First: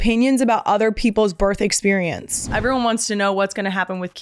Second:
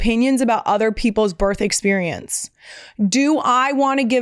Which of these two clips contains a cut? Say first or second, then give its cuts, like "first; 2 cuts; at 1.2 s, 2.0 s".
first; 1 cut; at 2.5 s